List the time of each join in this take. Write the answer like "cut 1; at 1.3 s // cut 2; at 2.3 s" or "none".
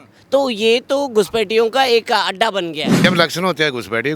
cut 1; at 3.0 s

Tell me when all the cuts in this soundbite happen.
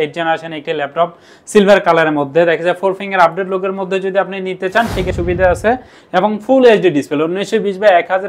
cut 1; at 5.1 s

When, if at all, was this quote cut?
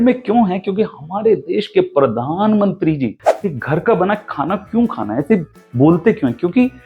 cut 1; at 3.2 s

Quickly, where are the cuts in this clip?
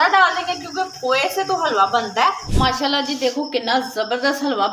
cut 1; at 2.5 s

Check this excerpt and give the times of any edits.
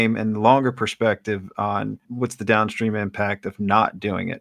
cut 1; at 2.1 s

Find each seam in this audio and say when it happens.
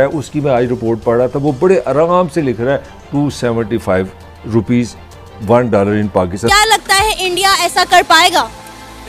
cut 1; at 6.5 s

